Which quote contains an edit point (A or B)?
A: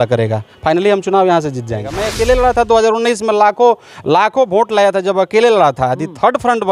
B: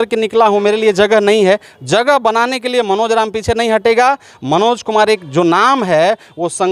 A